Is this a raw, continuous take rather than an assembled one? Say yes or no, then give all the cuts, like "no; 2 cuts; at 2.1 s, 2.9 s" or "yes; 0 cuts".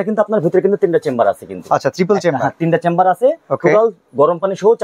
yes; 0 cuts